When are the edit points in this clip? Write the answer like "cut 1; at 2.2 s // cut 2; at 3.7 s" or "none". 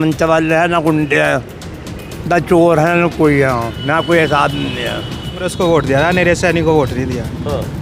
cut 1; at 5.5 s

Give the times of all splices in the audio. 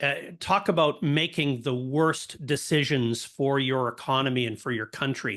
none

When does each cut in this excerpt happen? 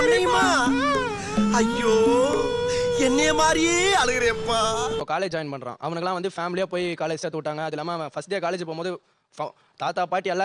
cut 1; at 5.0 s

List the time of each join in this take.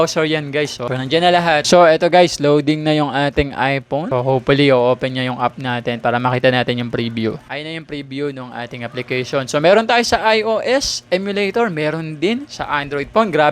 cut 1; at 1.6 s // cut 2; at 4.1 s // cut 3; at 7.4 s

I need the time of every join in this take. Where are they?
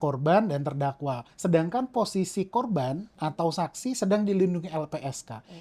cut 1; at 1.3 s

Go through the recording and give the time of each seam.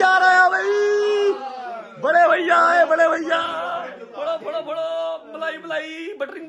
none

